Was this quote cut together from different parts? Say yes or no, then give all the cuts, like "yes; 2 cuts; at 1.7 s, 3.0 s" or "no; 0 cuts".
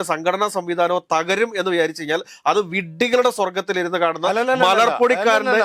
no; 0 cuts